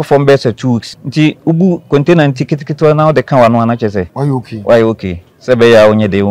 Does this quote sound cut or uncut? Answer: cut